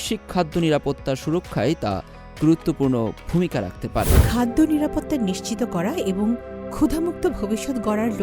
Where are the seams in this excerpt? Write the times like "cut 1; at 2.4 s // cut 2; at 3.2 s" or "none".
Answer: cut 1; at 4.2 s